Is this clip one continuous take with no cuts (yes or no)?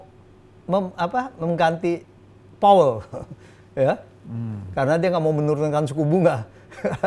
yes